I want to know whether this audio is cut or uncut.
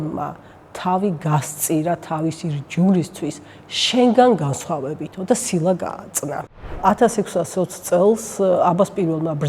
cut